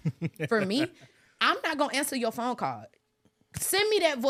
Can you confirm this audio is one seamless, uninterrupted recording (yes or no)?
yes